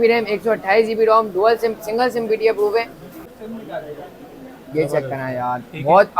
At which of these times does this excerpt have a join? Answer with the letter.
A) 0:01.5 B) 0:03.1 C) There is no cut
B